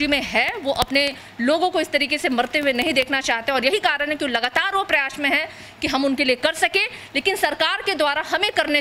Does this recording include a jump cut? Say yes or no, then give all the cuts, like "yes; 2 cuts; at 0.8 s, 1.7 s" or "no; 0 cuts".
no; 0 cuts